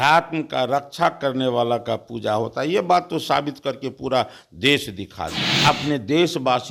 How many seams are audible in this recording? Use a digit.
1